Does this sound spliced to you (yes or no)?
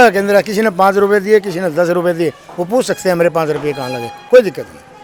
no